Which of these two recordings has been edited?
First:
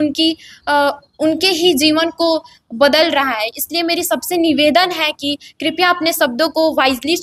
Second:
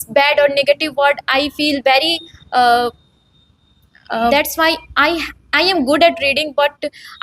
second; 1 cut; at 4.3 s

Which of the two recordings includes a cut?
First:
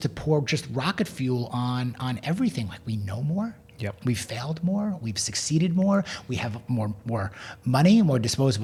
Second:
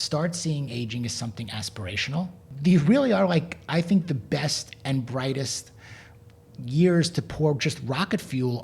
second; 1 cut; at 2.5 s

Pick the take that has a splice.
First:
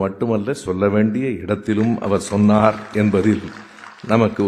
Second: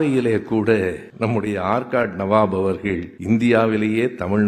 second; 2 cuts; at 1.1 s, 3.1 s

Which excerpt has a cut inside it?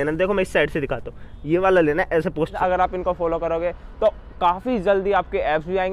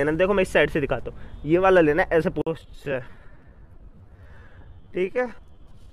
first; 1 cut; at 2.5 s

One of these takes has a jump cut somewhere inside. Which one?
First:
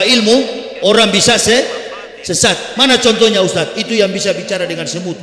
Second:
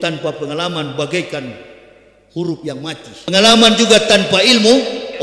second; 1 cut; at 3.3 s

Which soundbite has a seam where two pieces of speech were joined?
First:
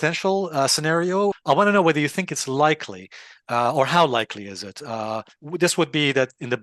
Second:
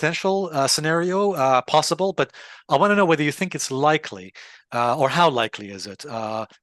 first; 1 cut; at 1.4 s

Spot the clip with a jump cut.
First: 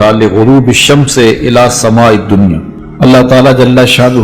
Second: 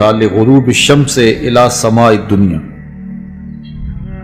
first; 1 cut; at 2.8 s

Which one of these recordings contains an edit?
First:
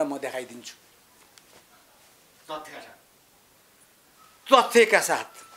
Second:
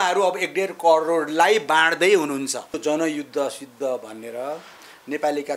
second; 1 cut; at 2.7 s

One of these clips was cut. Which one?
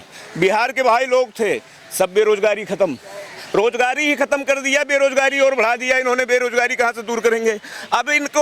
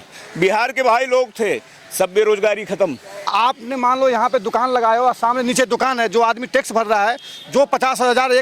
second; 1 cut; at 3.3 s

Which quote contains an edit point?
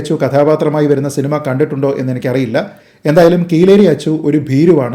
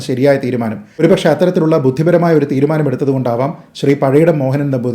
second; 1 cut; at 1.0 s

